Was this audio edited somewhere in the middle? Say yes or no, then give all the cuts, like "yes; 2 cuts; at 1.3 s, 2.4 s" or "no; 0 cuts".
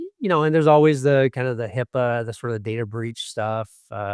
no; 0 cuts